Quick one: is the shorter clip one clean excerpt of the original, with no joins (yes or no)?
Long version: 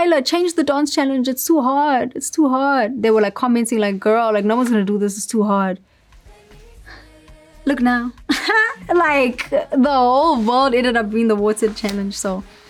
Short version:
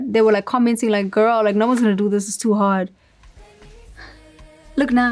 yes